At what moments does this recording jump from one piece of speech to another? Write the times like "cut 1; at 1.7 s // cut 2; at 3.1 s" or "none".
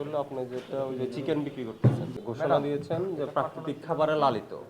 cut 1; at 2.2 s